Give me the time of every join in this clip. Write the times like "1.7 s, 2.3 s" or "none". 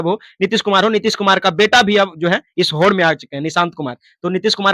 none